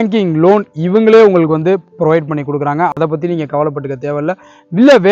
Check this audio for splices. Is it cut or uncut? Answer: uncut